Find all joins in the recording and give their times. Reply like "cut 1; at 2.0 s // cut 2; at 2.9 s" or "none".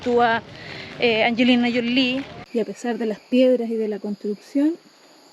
cut 1; at 2.3 s

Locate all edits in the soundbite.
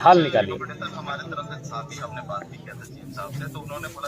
none

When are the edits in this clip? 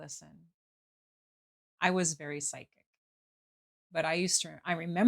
cut 1; at 1.0 s // cut 2; at 3.7 s

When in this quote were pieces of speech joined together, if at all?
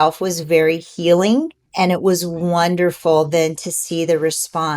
cut 1; at 1.6 s

